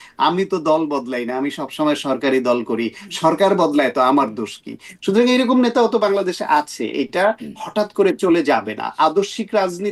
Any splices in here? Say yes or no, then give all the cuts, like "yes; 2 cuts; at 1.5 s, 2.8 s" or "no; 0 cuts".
no; 0 cuts